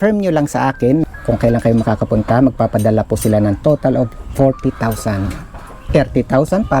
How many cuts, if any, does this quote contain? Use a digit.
1